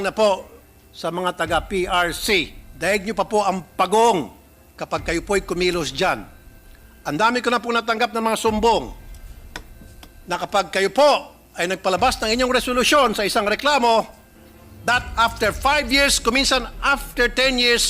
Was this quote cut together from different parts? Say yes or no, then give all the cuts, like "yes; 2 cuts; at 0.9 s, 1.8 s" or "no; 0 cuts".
yes; 1 cut; at 2.6 s